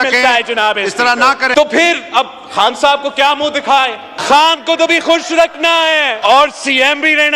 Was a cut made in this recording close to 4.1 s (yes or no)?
yes